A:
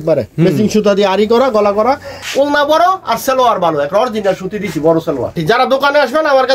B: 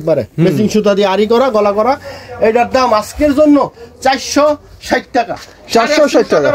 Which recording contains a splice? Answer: A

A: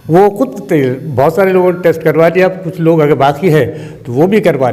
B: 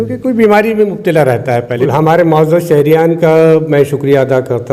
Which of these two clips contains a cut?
B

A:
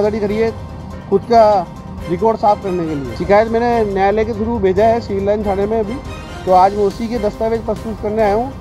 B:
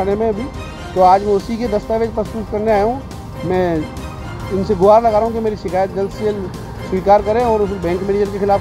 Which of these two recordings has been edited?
A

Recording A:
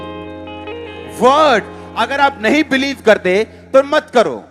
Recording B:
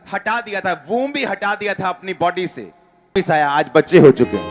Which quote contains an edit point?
B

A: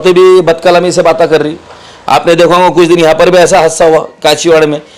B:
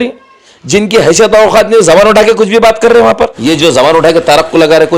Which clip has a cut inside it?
B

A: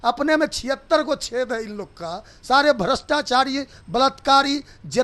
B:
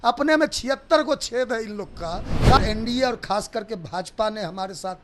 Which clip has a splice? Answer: B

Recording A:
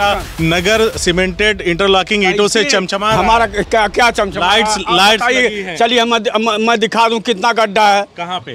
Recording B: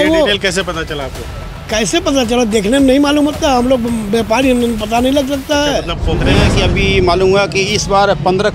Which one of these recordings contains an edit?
B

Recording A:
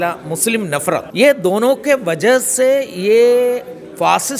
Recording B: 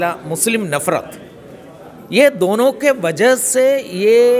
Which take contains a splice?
A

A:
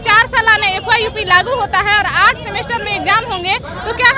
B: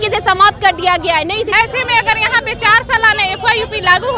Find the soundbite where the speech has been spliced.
B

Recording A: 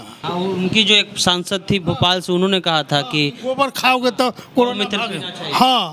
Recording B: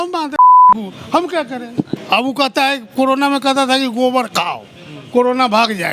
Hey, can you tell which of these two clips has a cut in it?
B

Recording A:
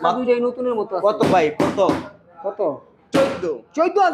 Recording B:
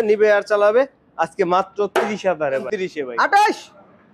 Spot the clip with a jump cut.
B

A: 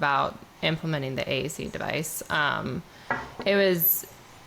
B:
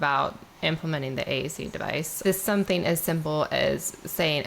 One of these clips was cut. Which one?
B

